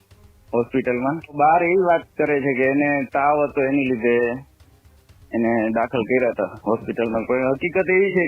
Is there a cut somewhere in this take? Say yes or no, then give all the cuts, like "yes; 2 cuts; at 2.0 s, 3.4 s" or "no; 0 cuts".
yes; 1 cut; at 1.3 s